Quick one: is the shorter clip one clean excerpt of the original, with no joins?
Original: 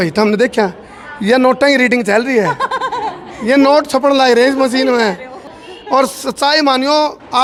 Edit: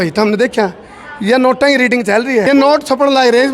no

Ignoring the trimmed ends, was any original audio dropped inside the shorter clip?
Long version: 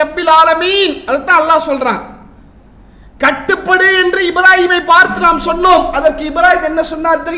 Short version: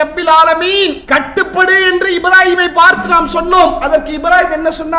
yes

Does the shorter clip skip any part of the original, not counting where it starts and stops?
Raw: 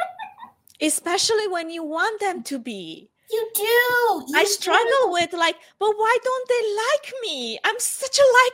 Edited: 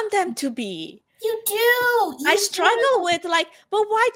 no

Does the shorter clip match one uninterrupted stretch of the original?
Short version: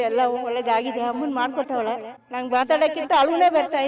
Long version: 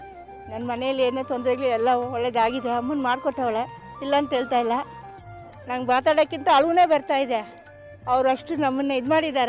no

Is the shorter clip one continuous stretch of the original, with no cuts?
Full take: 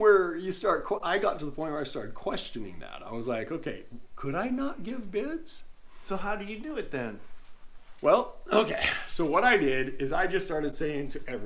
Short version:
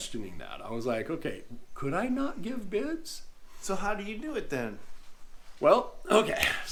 yes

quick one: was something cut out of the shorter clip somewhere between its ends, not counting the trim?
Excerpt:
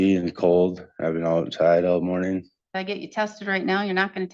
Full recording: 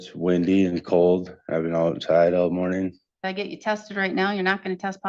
no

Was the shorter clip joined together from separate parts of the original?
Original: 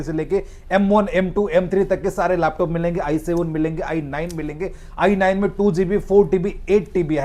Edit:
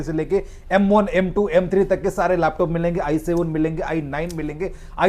no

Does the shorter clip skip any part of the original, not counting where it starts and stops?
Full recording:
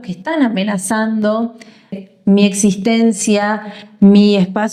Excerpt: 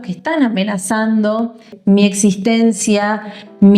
yes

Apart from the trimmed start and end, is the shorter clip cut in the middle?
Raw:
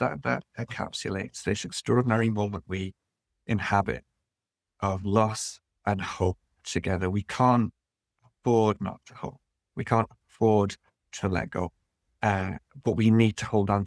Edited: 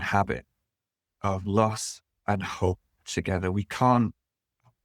no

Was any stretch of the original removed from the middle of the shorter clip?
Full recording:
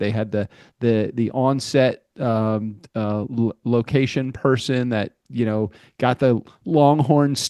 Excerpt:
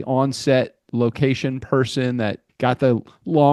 yes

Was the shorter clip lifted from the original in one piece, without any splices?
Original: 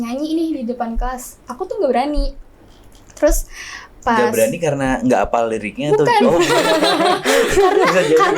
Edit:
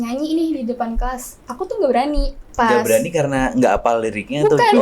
no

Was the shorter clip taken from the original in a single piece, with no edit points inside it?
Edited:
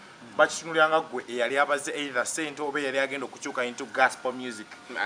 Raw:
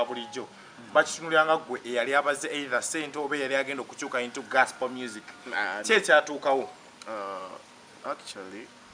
yes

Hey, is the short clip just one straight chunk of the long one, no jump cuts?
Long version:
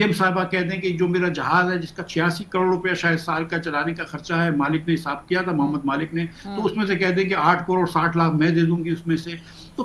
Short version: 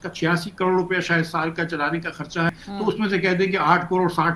no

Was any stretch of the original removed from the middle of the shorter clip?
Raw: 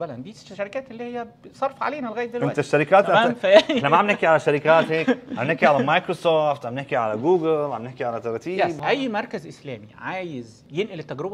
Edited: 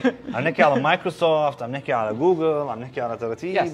no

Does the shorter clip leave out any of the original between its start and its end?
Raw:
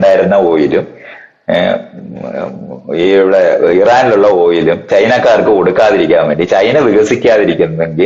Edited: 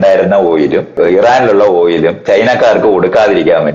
yes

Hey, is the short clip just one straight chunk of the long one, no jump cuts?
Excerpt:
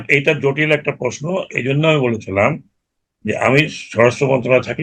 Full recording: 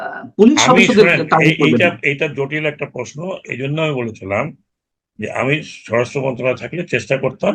yes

